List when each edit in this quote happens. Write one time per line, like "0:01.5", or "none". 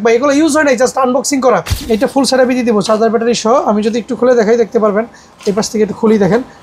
0:01.7